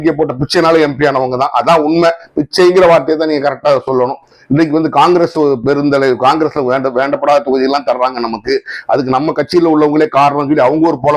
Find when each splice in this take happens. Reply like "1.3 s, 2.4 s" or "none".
none